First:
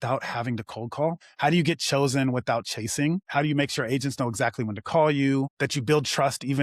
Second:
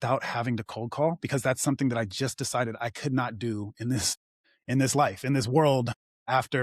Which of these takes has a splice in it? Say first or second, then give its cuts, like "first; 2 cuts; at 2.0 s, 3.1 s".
first; 1 cut; at 1.2 s